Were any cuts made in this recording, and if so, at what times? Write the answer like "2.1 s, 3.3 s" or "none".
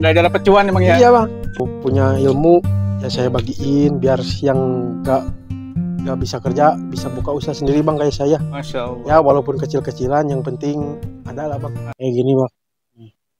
11.9 s

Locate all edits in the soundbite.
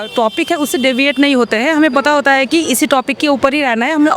none

